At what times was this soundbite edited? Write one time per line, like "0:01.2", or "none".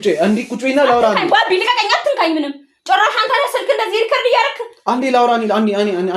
none